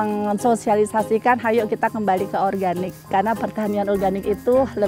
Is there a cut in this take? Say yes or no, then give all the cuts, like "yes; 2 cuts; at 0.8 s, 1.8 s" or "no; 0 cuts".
yes; 1 cut; at 3.0 s